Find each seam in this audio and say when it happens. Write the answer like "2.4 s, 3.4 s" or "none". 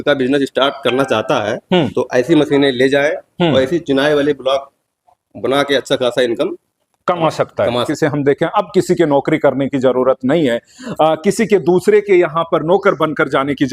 7.9 s